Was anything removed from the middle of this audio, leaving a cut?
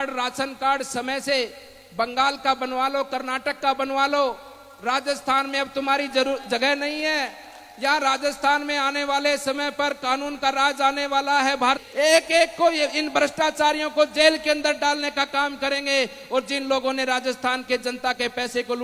yes; 1 cut; at 11.8 s

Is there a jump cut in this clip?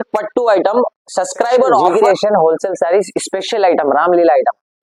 yes; 1 cut; at 1.9 s

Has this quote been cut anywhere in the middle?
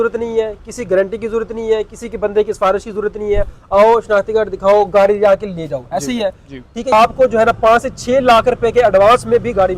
yes; 1 cut; at 6.9 s

